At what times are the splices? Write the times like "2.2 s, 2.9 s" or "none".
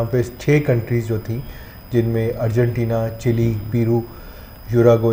none

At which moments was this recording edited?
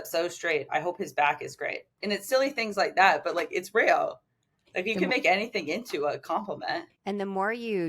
6.9 s

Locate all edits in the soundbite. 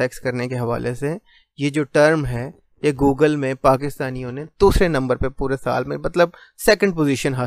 none

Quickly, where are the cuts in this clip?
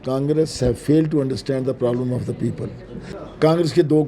3.2 s

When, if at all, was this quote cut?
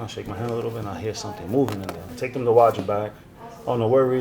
2.0 s

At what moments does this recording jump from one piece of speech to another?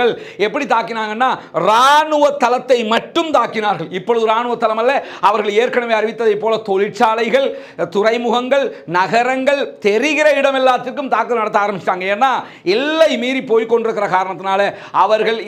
none

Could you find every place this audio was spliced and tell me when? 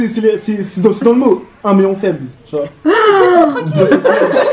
none

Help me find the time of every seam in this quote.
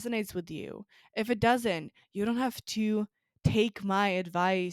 none

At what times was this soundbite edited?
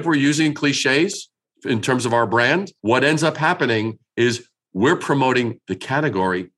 2.7 s

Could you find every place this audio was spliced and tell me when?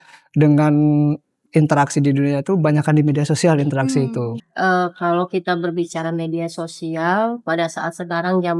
4.4 s

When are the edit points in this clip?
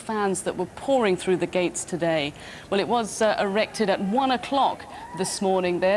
3.5 s

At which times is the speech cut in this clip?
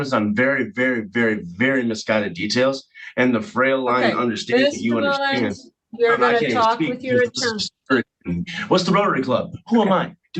none

